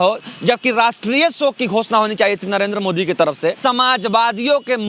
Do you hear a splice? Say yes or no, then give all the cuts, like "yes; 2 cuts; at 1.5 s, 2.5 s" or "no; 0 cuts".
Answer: yes; 1 cut; at 3.6 s